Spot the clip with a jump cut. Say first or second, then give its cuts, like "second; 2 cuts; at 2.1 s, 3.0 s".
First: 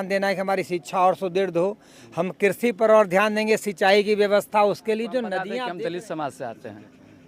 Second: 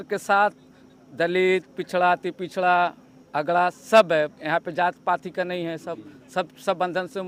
first; 1 cut; at 5.6 s